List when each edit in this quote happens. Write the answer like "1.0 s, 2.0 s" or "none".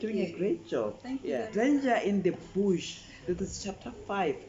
1.5 s